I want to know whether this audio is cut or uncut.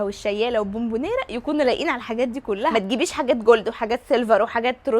cut